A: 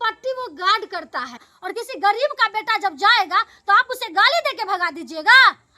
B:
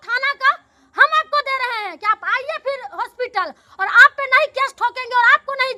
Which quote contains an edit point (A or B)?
A